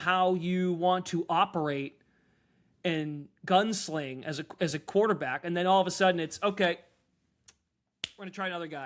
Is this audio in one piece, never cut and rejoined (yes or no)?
yes